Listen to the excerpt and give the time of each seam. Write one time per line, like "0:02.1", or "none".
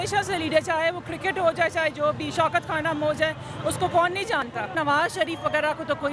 0:04.7